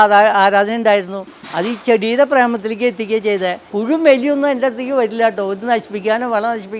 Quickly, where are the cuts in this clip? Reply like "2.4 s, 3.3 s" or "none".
3.6 s